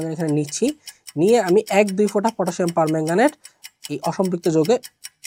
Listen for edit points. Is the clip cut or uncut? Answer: uncut